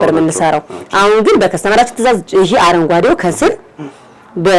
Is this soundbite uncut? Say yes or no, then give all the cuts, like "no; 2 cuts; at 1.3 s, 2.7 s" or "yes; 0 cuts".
yes; 0 cuts